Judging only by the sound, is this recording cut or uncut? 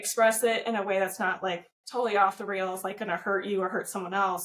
cut